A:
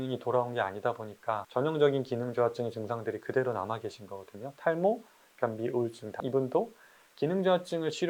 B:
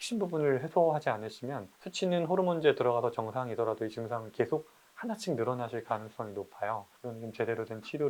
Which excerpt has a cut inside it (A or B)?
A